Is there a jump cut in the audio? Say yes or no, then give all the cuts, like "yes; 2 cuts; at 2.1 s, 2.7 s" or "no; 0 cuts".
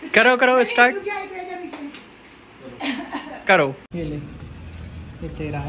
yes; 1 cut; at 3.8 s